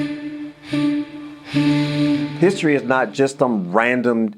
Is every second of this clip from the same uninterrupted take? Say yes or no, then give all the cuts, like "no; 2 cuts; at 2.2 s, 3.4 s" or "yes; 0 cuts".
no; 1 cut; at 1.8 s